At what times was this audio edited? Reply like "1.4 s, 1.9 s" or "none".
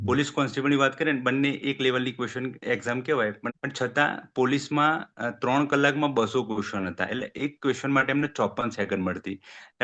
3.5 s